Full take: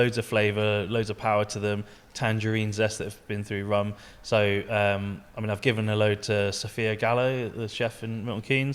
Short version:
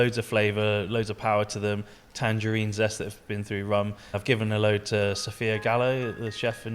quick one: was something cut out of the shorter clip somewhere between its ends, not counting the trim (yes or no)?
yes